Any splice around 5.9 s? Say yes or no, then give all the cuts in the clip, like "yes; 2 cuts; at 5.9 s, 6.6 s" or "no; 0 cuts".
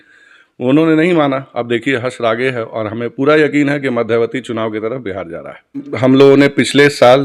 yes; 1 cut; at 5.9 s